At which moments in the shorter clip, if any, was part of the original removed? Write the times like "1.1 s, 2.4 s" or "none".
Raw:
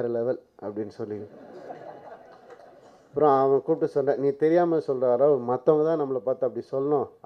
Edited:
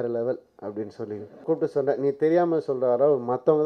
1.4 s